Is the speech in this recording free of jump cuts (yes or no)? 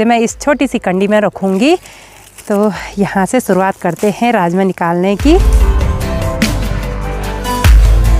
yes